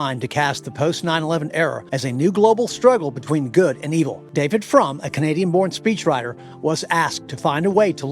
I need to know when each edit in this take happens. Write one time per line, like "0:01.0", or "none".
0:01.8
0:04.2

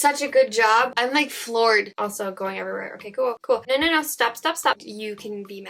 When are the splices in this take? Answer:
0:01.9
0:04.8

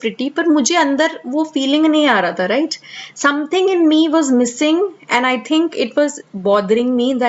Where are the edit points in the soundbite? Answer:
none

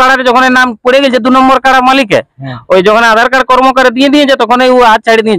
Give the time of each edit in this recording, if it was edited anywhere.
none

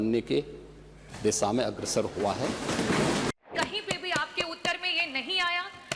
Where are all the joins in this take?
0:03.3

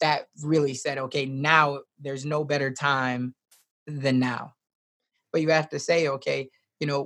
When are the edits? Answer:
0:05.2

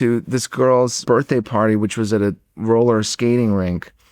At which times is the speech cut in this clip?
0:01.0

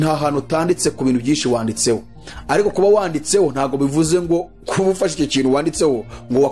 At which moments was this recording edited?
none

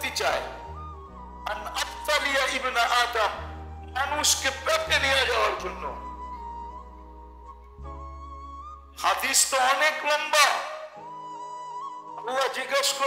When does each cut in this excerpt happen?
none

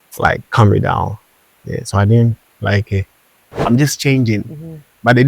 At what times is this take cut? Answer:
0:03.6

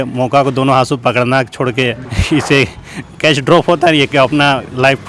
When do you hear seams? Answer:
0:02.0

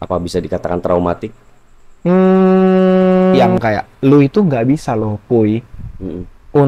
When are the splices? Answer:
0:03.5

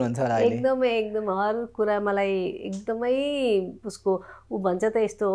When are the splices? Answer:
none

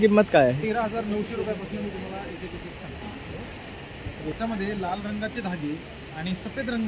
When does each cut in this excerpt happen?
0:04.3

